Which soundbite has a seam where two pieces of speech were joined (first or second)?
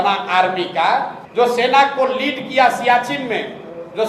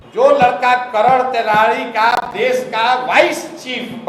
first